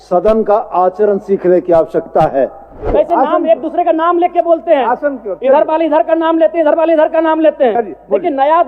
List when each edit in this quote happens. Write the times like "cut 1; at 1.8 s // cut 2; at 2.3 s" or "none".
cut 1; at 2.8 s